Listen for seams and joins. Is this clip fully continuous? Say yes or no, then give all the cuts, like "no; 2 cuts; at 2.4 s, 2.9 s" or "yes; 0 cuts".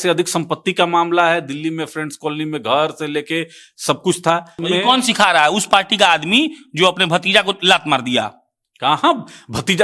no; 1 cut; at 4.5 s